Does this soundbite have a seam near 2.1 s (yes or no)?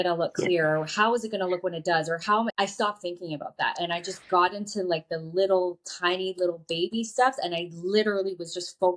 no